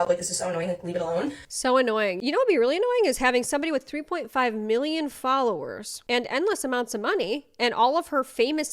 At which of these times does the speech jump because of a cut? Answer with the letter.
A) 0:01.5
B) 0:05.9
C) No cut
A